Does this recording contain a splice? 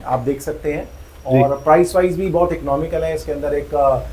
no; 0 cuts

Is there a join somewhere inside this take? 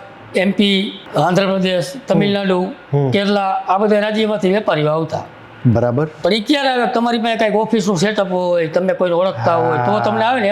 yes; 2 cuts; at 1.0 s, 6.1 s

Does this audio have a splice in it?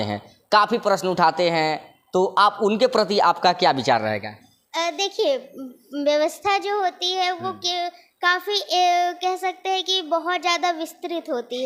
no; 0 cuts

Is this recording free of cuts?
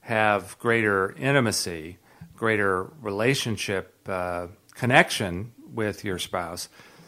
yes; 0 cuts

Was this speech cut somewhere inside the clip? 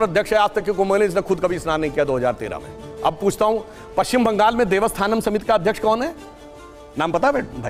no; 0 cuts

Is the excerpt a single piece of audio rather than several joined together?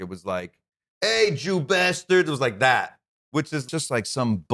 no; 1 cut; at 3.6 s

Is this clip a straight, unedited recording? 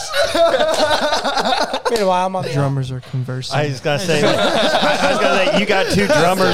no; 1 cut; at 2.5 s

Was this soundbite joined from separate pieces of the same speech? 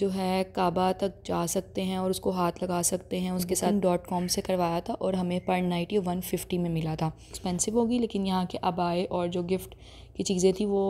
yes; 2 cuts; at 3.7 s, 7.3 s

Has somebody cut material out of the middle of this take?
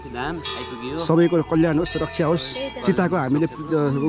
no; 0 cuts

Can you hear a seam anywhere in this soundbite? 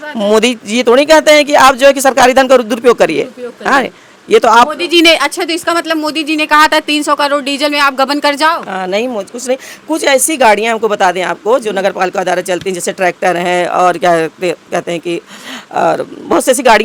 no; 0 cuts

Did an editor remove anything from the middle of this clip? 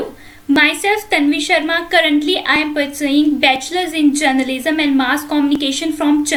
no; 0 cuts

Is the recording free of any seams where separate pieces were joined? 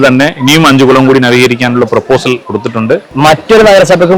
no; 1 cut; at 3.1 s

